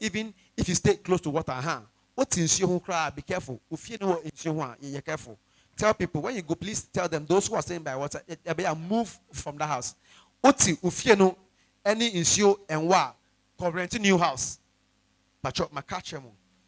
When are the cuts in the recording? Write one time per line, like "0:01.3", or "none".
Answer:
none